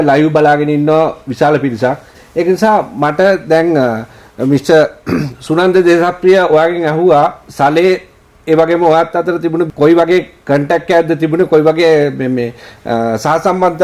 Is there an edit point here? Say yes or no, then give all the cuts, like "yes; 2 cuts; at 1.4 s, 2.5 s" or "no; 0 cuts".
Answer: no; 0 cuts